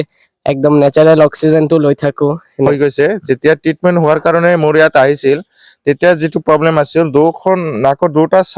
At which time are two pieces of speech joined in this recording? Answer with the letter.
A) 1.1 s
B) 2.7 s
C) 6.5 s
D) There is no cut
B